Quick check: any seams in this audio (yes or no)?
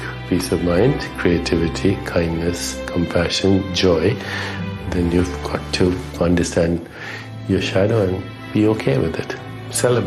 no